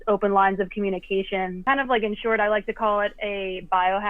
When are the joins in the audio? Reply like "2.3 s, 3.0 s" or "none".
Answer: 1.5 s